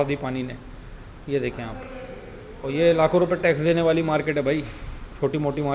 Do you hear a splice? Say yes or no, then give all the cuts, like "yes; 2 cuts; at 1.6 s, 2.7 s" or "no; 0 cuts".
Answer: no; 0 cuts